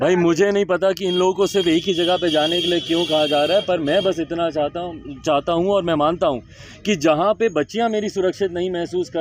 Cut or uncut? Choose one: uncut